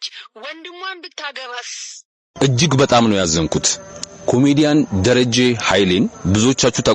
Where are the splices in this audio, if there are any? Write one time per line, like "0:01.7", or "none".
0:02.2